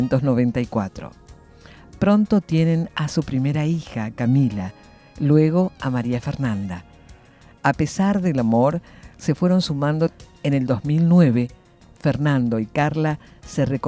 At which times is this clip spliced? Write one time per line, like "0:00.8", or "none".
none